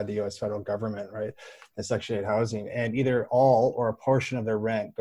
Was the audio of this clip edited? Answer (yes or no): no